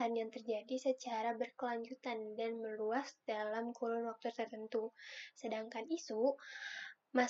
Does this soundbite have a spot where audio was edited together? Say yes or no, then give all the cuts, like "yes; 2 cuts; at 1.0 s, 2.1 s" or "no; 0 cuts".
no; 0 cuts